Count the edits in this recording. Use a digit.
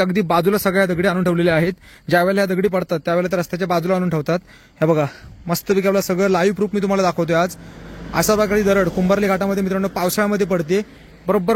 0